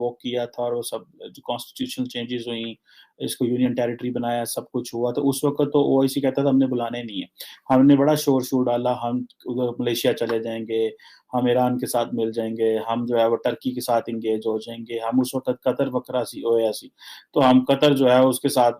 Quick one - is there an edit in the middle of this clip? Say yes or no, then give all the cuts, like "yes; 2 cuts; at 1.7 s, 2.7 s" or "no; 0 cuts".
no; 0 cuts